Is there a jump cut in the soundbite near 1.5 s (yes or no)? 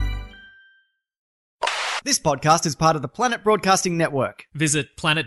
yes